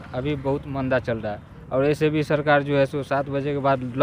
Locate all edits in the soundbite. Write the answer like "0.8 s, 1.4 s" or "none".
none